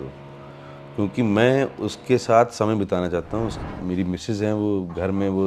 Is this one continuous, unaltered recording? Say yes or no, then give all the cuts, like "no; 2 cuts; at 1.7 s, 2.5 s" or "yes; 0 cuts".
no; 1 cut; at 3.6 s